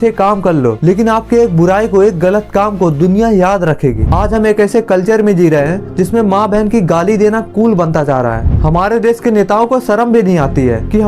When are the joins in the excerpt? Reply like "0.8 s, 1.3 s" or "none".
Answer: 4.0 s, 8.5 s